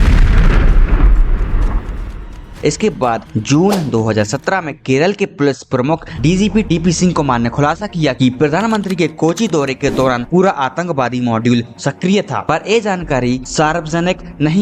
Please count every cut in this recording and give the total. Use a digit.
0